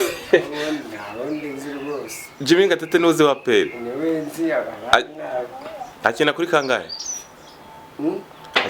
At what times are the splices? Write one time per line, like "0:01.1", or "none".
none

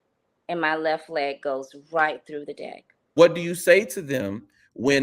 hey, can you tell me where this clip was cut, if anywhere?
0:03.1

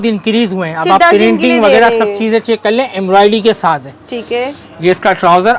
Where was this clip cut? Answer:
none

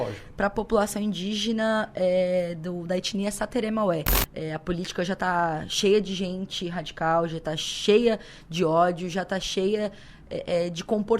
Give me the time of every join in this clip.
0:04.2

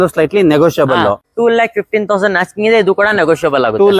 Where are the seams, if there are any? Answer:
0:01.3

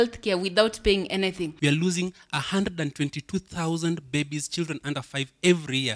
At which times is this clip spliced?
0:01.5

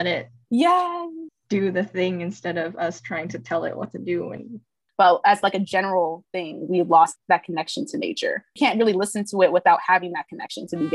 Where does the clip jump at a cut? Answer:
0:04.8
0:07.1
0:08.6

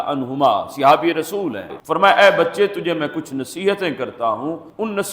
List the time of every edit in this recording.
0:01.7

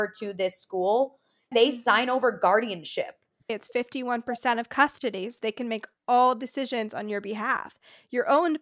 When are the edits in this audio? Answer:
0:01.5
0:03.5

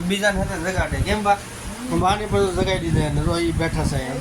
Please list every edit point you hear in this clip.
none

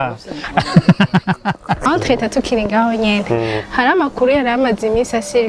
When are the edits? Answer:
0:01.8

